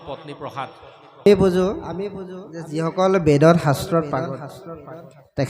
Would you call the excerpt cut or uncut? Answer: cut